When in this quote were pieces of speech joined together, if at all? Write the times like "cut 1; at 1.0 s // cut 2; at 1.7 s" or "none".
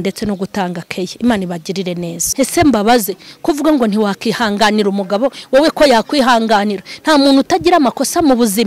cut 1; at 2.2 s